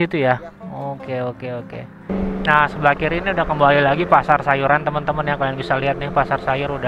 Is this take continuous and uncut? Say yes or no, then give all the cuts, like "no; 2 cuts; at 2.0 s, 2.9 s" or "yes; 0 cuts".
no; 1 cut; at 2.1 s